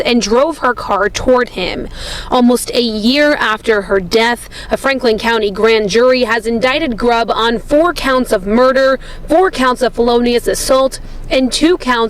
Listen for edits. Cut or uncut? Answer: cut